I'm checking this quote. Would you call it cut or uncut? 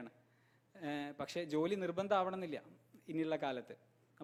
uncut